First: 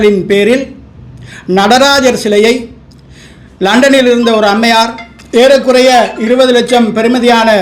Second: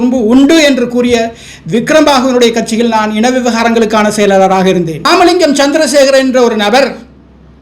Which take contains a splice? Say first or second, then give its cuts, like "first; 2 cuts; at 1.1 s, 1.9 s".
second; 1 cut; at 5.1 s